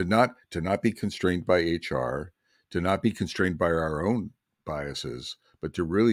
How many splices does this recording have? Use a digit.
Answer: 0